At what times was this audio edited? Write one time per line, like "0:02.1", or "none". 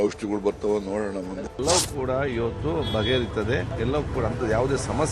0:01.5
0:03.7

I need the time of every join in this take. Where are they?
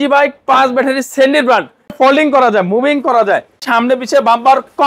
0:01.9
0:03.6

